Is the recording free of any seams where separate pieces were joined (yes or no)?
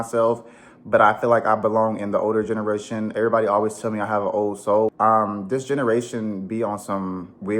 no